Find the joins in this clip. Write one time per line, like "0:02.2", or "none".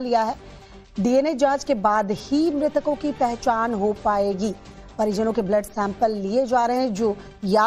0:04.0